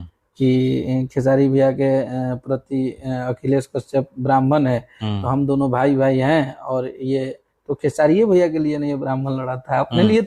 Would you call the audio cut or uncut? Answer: uncut